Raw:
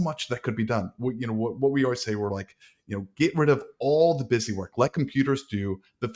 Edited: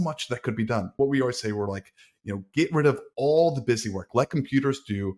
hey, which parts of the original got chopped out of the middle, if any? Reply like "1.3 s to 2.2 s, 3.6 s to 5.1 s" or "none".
0.9 s to 1.6 s